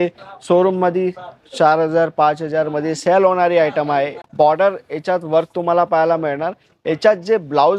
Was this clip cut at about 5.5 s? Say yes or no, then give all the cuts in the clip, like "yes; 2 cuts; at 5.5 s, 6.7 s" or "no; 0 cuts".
no; 1 cut; at 4.2 s